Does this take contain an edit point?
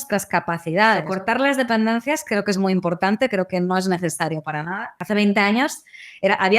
yes; 2 cuts; at 1.1 s, 5.0 s

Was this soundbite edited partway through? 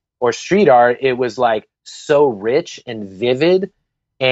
no; 0 cuts

